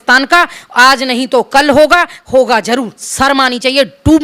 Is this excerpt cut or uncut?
cut